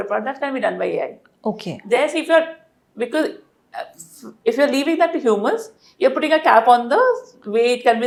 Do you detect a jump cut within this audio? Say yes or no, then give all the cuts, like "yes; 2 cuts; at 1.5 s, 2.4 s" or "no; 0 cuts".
no; 0 cuts